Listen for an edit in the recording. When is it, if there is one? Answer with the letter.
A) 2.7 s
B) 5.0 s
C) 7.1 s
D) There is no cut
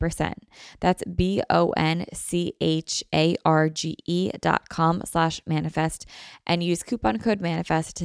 D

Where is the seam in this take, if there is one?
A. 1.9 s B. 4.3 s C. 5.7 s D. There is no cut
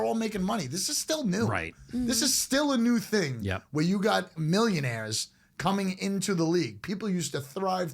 B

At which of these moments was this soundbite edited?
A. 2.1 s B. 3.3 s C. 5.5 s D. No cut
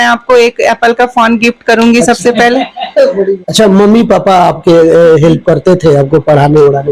B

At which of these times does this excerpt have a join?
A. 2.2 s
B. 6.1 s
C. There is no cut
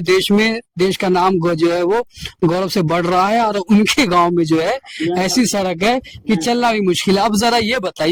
C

